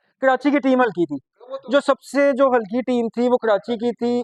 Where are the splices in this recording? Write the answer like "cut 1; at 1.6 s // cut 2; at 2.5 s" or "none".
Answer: none